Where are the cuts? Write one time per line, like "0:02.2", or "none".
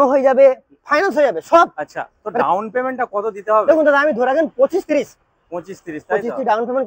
none